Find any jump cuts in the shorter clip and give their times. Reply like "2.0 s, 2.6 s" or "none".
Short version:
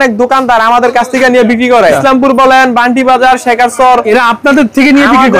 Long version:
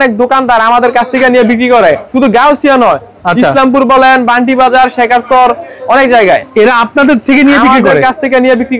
2.0 s, 4.0 s